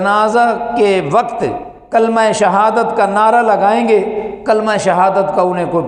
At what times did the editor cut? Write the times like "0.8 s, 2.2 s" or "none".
none

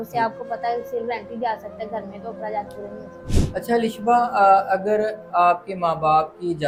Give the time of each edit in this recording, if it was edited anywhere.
none

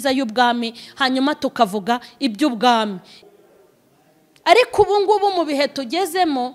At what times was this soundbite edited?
3.2 s

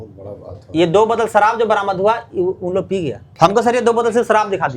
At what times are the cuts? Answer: 3.2 s

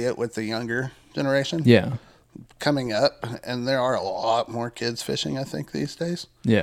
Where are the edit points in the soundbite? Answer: none

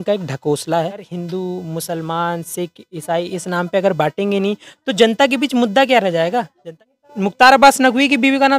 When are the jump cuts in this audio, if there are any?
1.1 s, 6.6 s

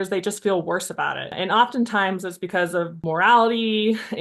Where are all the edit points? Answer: 1.3 s, 3.0 s

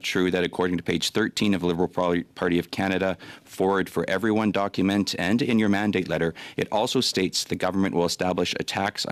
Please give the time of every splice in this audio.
none

